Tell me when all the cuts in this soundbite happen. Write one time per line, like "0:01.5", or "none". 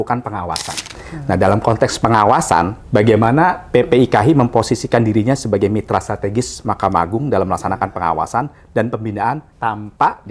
0:00.9
0:02.8
0:09.5